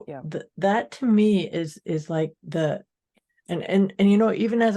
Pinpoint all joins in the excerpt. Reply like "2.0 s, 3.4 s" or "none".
3.0 s